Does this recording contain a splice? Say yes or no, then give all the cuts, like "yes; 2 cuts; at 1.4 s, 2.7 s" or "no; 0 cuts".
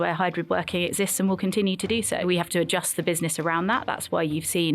yes; 1 cut; at 2.2 s